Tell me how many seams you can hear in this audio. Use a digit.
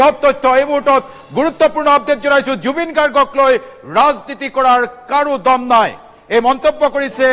1